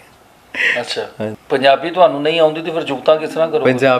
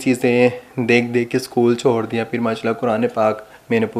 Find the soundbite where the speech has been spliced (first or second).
first